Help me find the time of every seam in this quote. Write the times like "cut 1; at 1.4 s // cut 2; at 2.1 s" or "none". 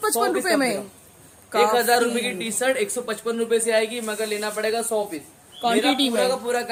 none